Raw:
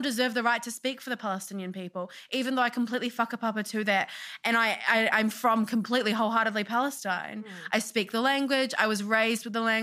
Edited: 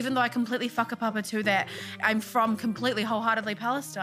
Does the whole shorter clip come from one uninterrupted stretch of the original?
no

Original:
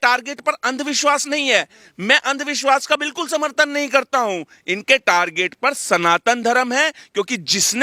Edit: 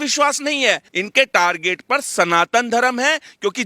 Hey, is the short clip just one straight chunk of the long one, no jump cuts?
no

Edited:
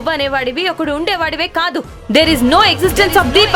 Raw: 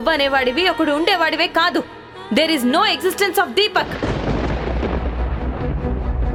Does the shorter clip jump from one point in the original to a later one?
yes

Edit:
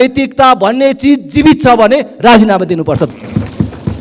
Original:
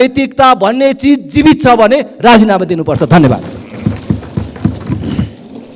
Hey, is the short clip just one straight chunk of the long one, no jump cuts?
no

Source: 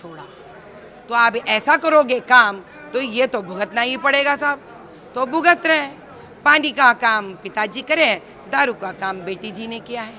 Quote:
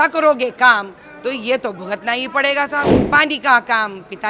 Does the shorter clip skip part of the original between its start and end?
yes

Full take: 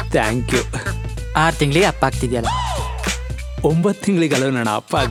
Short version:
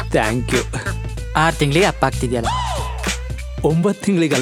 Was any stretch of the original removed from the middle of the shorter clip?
no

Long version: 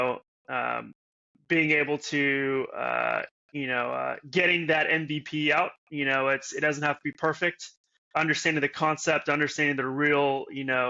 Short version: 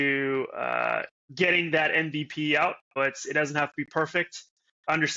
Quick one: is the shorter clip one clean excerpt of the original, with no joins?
no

